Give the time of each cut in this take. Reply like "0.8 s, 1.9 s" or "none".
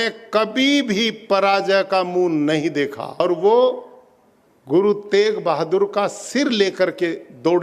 3.2 s